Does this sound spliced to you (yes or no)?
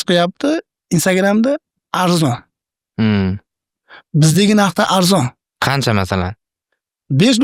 no